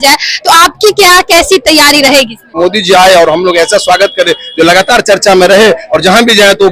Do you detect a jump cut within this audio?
yes; 1 cut; at 2.5 s

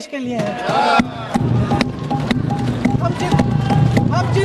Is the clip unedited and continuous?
yes; 0 cuts

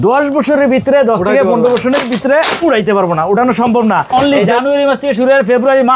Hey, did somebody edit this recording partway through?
yes; 1 cut; at 4.1 s

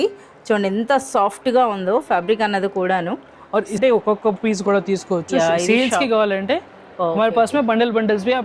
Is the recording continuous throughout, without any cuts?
no; 1 cut; at 3.8 s

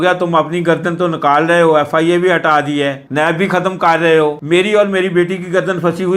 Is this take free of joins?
yes; 0 cuts

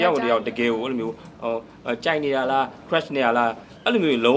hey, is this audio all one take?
yes; 0 cuts

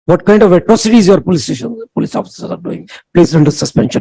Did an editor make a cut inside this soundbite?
yes; 1 cut; at 2.8 s

